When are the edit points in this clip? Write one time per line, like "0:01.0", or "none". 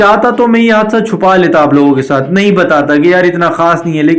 none